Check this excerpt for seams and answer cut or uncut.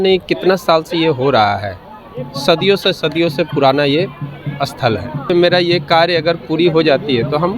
cut